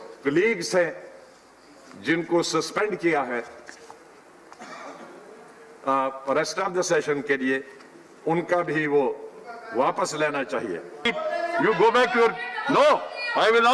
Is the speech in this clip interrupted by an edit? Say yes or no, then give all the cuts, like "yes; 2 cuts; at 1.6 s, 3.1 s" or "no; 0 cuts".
yes; 1 cut; at 11.1 s